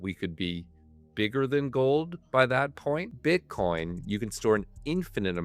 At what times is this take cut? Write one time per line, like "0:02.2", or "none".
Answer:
0:03.1